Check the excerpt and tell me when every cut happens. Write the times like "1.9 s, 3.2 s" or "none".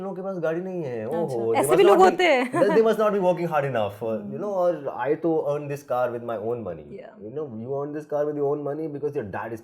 none